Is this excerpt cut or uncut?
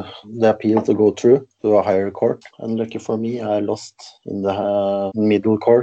cut